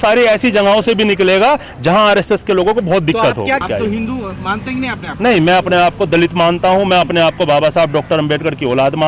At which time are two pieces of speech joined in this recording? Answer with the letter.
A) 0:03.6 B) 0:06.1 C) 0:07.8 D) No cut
A